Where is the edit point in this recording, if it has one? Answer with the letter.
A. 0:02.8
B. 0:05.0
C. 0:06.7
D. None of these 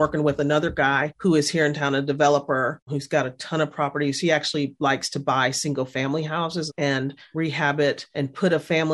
C